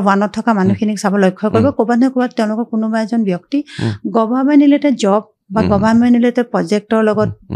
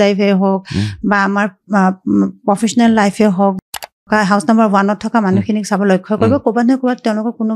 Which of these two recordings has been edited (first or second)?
second